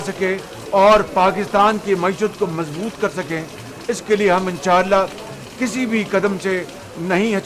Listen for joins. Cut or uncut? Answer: uncut